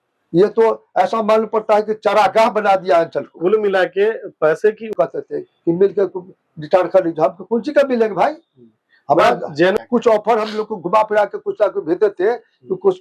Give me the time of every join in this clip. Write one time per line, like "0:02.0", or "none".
0:04.9
0:09.8